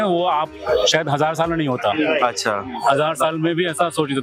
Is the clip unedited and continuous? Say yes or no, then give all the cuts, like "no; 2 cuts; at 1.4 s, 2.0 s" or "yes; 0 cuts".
yes; 0 cuts